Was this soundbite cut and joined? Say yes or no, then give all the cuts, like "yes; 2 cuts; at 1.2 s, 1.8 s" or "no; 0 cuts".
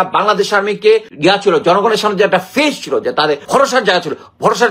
yes; 2 cuts; at 1.1 s, 3.4 s